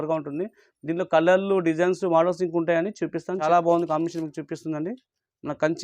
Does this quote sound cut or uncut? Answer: cut